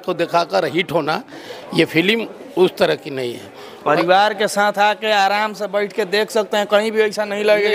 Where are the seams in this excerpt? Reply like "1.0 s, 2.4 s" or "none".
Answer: none

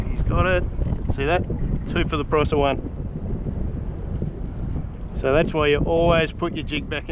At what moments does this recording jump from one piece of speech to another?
none

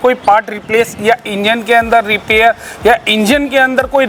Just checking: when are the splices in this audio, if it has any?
none

